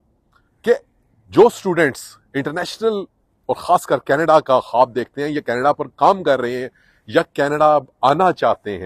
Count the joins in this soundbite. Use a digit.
0